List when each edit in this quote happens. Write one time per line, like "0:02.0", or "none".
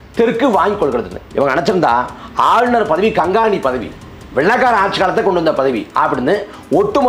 0:01.2